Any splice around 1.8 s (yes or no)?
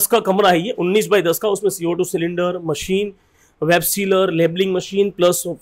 no